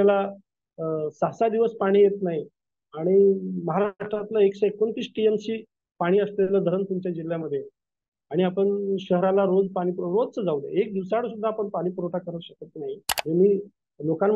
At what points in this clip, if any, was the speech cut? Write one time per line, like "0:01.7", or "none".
0:13.1